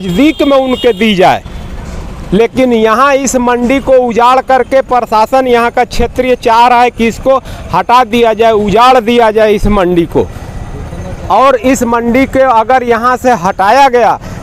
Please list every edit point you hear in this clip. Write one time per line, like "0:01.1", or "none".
none